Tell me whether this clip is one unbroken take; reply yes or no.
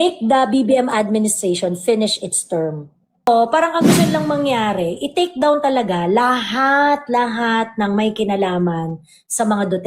no